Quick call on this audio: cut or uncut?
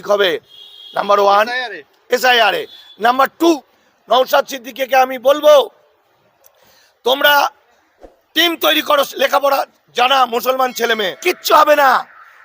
cut